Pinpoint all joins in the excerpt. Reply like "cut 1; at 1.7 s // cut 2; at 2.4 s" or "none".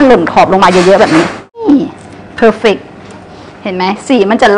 cut 1; at 1.6 s